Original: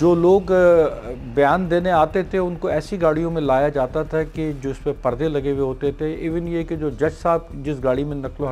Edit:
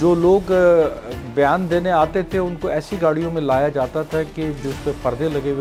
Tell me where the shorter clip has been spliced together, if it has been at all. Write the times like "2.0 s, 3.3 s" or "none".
none